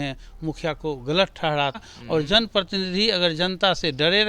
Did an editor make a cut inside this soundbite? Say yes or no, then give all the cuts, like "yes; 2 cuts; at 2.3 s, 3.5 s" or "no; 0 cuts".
yes; 1 cut; at 1.9 s